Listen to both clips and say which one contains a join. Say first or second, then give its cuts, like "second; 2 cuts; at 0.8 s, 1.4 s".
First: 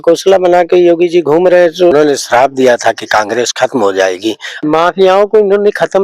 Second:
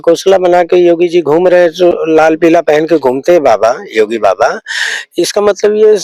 first; 2 cuts; at 1.9 s, 4.5 s